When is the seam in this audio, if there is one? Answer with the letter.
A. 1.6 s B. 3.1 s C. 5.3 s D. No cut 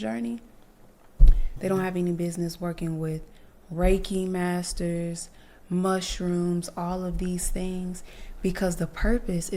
A